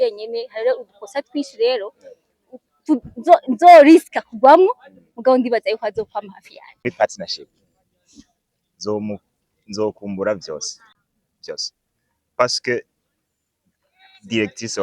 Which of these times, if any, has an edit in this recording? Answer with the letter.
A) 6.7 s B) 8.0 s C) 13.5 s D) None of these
A